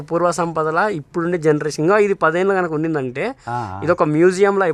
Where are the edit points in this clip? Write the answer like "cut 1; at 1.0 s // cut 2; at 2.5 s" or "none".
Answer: none